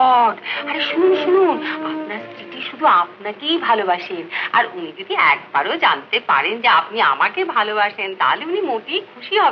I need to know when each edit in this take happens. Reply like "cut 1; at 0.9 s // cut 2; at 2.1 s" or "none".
none